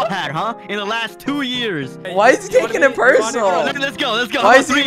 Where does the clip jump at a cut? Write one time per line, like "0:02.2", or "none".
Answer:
0:02.1
0:03.8